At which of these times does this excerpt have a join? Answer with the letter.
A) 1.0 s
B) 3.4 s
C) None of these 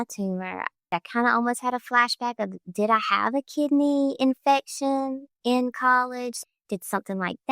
A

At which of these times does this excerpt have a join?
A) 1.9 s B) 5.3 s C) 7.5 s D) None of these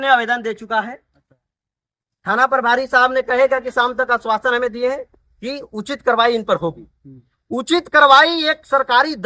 D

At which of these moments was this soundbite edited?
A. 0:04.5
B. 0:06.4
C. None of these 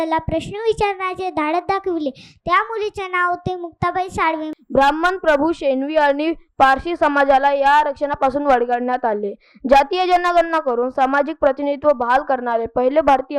A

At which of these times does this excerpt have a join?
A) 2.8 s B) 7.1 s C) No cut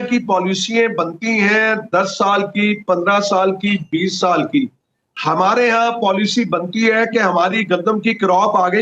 C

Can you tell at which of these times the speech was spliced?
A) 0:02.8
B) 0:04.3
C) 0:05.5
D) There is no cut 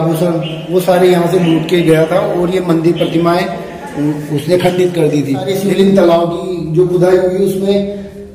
C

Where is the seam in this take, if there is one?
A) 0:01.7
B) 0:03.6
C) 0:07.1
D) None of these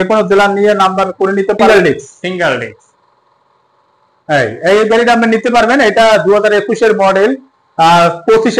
A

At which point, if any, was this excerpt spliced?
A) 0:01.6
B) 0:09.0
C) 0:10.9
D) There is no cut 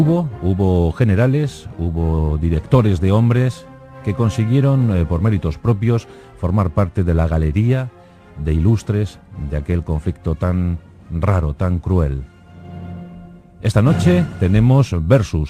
D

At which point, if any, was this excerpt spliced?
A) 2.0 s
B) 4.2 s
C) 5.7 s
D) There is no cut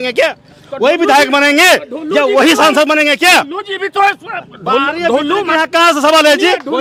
D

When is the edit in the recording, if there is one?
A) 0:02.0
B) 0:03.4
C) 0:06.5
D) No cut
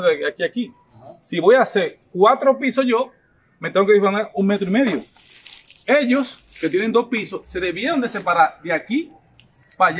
D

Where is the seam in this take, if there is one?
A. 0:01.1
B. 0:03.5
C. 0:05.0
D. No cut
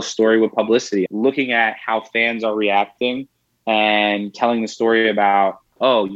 A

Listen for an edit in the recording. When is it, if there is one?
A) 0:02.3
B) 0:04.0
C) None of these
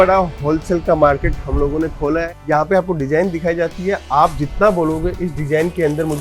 A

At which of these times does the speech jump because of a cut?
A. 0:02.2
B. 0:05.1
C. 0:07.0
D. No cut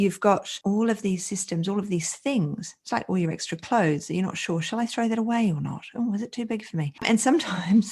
C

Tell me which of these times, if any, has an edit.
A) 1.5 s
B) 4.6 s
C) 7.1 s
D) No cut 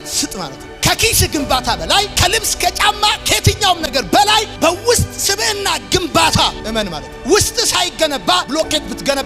D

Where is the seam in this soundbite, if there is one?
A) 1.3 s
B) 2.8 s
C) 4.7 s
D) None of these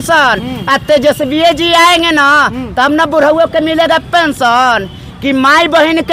D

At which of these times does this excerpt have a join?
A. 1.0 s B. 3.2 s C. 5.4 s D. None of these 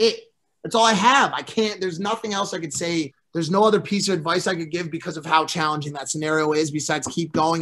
B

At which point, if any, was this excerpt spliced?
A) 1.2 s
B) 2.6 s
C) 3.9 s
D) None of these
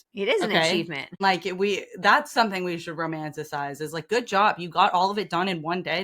A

